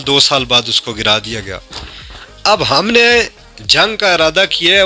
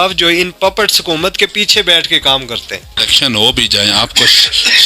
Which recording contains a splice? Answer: second; 1 cut; at 3.0 s

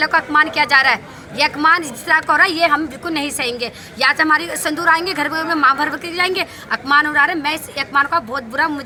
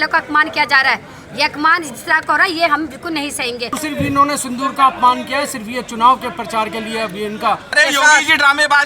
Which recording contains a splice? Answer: second; 2 cuts; at 3.8 s, 7.8 s

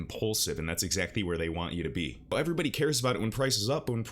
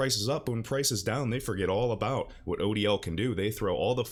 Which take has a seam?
first; 1 cut; at 2.3 s

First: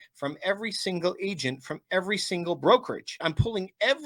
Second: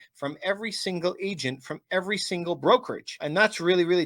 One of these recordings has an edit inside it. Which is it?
first; 1 cut; at 3.1 s

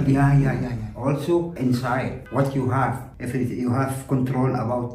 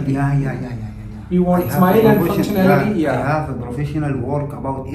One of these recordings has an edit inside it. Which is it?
first; 2 cuts; at 0.9 s, 3.1 s

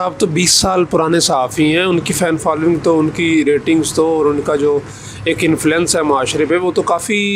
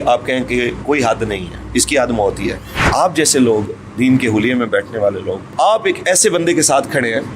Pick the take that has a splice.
second; 2 cuts; at 2.7 s, 5.7 s

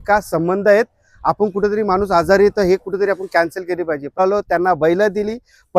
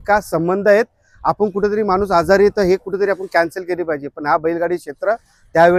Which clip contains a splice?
first; 1 cut; at 4.2 s

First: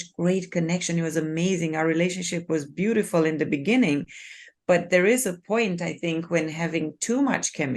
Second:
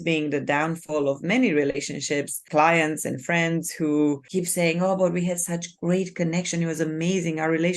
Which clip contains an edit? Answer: second; 2 cuts; at 2.4 s, 4.2 s

